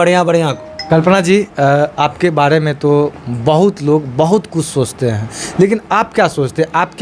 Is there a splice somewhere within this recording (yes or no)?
yes